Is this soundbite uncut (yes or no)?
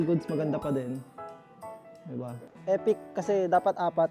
no